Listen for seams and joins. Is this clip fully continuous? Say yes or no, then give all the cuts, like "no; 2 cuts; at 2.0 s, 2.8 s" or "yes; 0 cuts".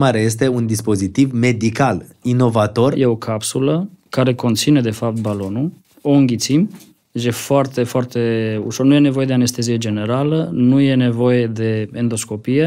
no; 2 cuts; at 3.0 s, 5.8 s